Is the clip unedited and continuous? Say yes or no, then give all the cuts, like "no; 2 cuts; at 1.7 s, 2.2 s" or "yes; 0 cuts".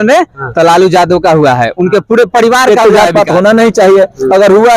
no; 1 cut; at 2.7 s